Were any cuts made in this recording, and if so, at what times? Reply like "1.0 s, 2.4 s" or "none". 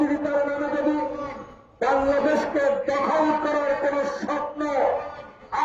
none